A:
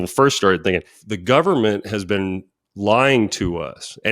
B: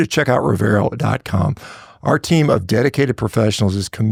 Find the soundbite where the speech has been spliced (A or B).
A